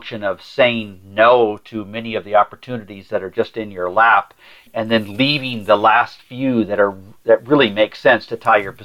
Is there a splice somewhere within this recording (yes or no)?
yes